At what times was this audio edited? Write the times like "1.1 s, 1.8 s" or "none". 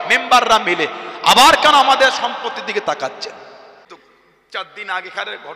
3.9 s